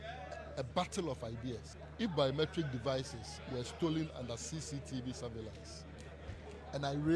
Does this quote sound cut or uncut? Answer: cut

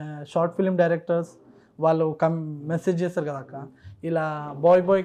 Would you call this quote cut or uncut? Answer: uncut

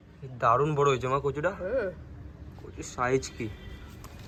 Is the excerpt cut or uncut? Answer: uncut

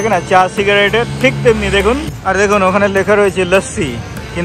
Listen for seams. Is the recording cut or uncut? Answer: cut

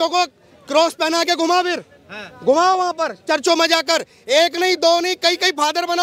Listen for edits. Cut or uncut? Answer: uncut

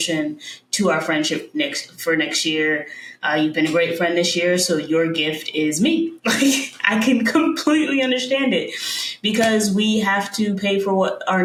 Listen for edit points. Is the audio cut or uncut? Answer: uncut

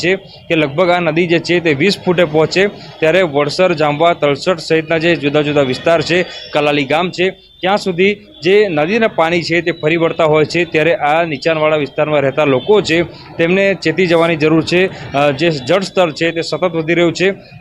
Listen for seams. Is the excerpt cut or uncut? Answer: cut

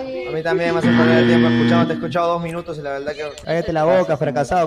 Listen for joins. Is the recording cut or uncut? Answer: cut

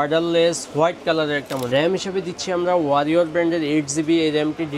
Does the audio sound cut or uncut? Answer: cut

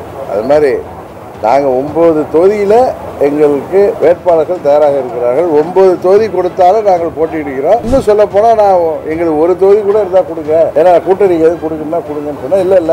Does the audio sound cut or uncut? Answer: cut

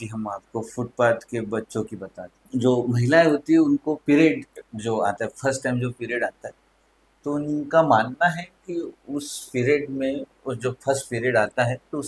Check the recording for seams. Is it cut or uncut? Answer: uncut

